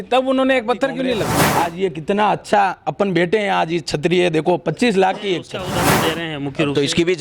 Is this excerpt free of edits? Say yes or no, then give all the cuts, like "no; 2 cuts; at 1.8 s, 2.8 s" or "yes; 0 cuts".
no; 2 cuts; at 1.4 s, 5.7 s